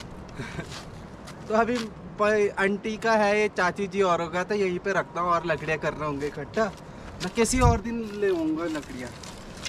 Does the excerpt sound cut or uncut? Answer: uncut